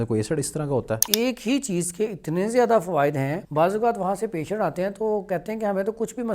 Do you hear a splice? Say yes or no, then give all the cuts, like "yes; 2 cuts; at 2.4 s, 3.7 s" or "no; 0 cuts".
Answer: yes; 2 cuts; at 1.0 s, 3.4 s